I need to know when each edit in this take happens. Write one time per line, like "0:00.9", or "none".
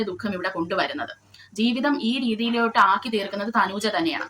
none